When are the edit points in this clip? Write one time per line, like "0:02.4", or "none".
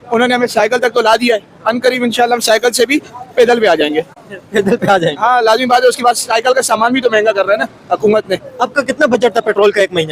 none